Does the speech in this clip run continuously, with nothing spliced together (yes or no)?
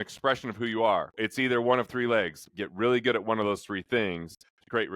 no